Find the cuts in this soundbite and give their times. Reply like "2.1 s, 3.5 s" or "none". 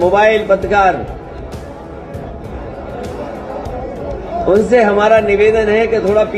none

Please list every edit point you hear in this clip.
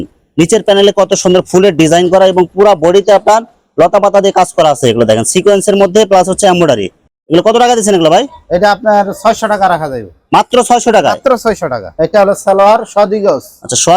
none

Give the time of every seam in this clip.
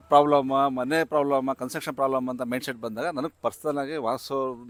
none

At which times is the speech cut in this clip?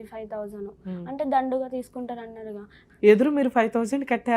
2.8 s

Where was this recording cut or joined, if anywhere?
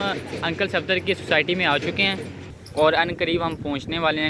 none

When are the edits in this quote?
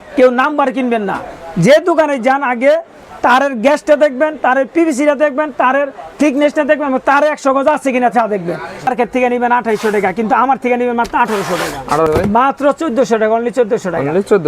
8.9 s, 12.1 s

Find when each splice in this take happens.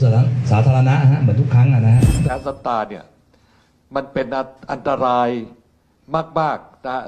2.3 s

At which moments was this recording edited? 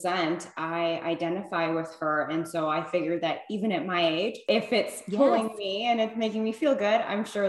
4.4 s

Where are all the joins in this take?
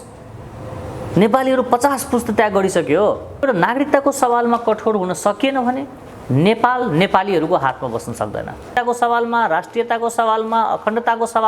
3.4 s, 8.7 s

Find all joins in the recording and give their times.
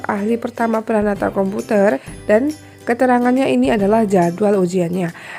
2.1 s

